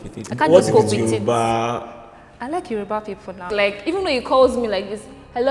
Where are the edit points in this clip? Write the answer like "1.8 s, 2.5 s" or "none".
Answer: 3.4 s